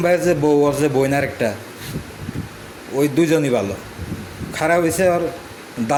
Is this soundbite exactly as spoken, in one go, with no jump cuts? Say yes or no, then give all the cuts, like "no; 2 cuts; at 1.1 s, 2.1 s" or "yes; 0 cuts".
yes; 0 cuts